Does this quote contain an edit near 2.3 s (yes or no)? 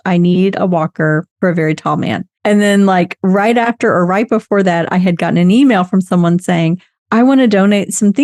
yes